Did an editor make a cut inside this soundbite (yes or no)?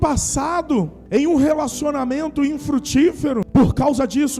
yes